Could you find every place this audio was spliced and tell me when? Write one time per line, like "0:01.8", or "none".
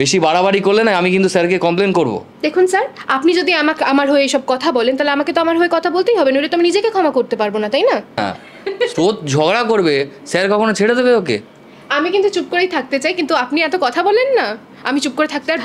0:08.2

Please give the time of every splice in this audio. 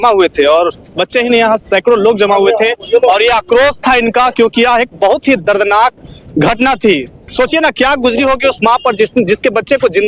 none

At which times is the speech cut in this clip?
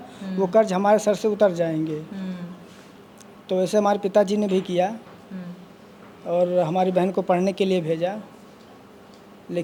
none

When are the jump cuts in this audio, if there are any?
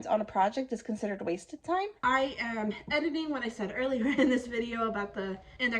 0:02.0

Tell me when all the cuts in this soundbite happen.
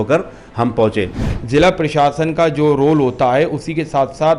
0:01.2

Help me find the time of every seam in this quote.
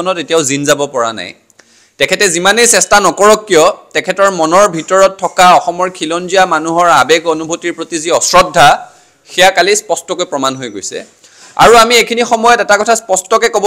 none

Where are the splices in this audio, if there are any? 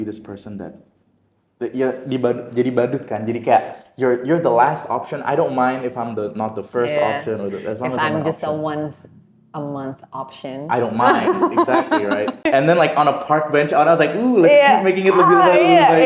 0:12.4

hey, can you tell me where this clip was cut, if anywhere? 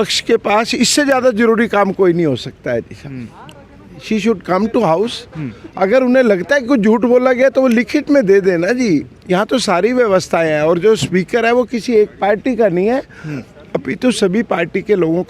none

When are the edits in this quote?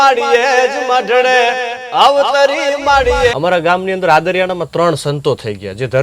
0:03.3

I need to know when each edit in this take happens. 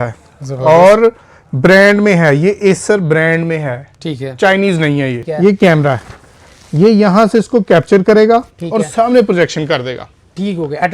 0:05.2

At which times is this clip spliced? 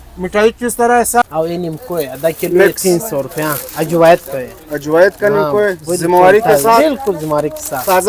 0:01.2

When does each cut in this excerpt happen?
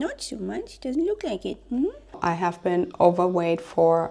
0:02.1

